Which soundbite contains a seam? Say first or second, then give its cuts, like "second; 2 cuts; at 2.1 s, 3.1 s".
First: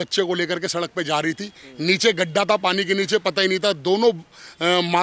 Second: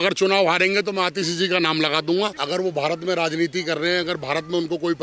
second; 1 cut; at 2.4 s